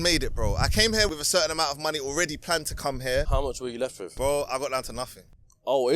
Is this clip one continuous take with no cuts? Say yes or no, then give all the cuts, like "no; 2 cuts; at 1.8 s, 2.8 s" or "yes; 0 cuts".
no; 2 cuts; at 1.1 s, 3.5 s